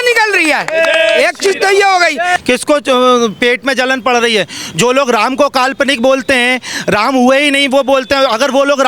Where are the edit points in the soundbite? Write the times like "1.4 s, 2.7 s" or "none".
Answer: 2.3 s

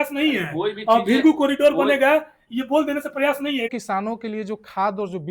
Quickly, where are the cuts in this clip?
3.7 s

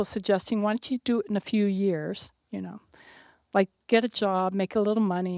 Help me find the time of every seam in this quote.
none

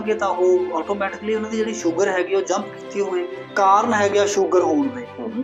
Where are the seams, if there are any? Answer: 3.4 s

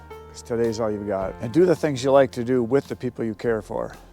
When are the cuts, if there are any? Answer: 1.4 s

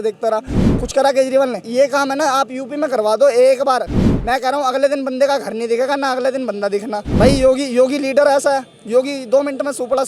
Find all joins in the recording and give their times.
1.6 s, 7.1 s

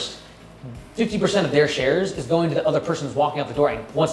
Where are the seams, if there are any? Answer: none

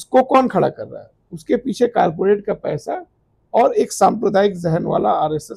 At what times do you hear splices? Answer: none

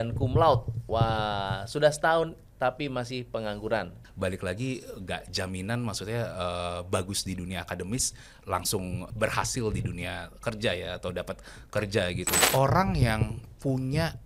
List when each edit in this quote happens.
4.0 s, 9.1 s, 12.3 s

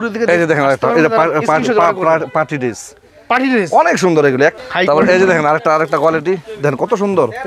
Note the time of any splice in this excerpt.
4.5 s

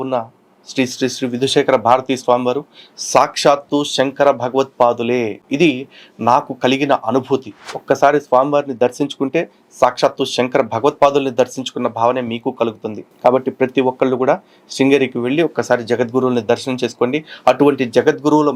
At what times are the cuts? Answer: none

